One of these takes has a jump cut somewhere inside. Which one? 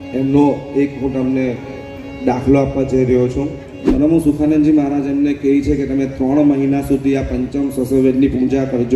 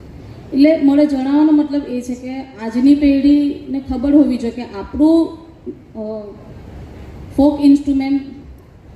first; 1 cut; at 3.8 s

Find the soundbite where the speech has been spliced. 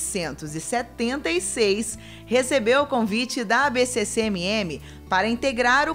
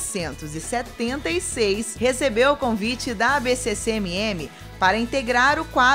second; 1 cut; at 1.9 s

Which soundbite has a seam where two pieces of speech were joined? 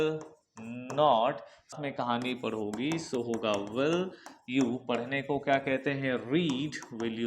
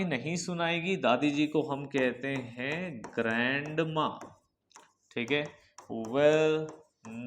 first; 1 cut; at 1.8 s

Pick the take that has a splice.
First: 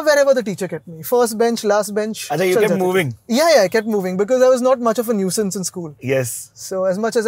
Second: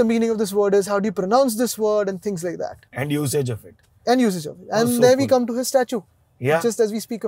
first; 1 cut; at 2.2 s

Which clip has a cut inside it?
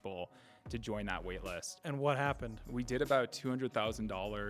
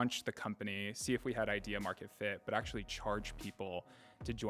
first; 1 cut; at 2.2 s

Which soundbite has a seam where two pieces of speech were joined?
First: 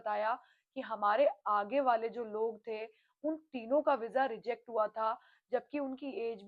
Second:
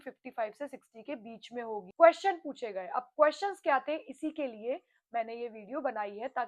second; 1 cut; at 1.8 s

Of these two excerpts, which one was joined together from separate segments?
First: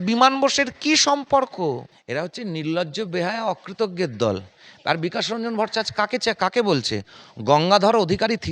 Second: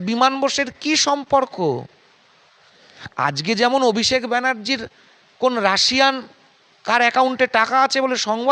first; 1 cut; at 1.9 s

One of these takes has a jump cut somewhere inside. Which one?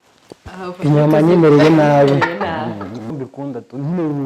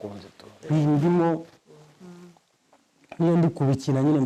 first; 1 cut; at 3.1 s

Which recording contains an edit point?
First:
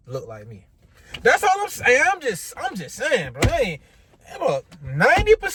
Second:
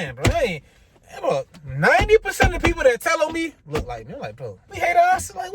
second; 1 cut; at 4.6 s

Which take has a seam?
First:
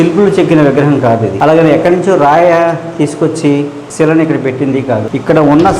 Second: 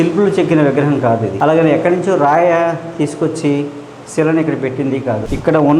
first; 1 cut; at 3.8 s

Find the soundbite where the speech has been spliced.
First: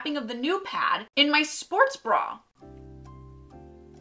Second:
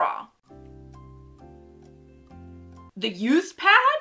first; 1 cut; at 1.1 s

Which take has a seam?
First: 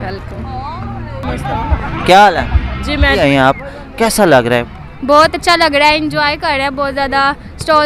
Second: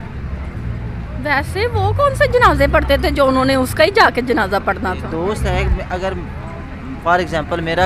first; 1 cut; at 3.2 s

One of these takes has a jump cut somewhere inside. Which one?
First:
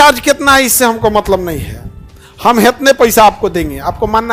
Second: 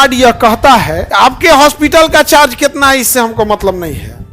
second; 1 cut; at 1.0 s

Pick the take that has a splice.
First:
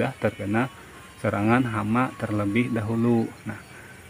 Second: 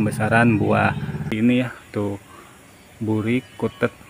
second; 1 cut; at 1.2 s

